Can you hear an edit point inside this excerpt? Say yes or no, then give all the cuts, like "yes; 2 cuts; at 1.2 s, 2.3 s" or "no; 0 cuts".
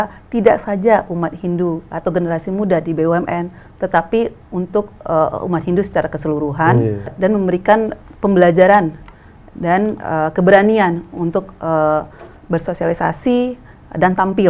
yes; 2 cuts; at 7.1 s, 8.0 s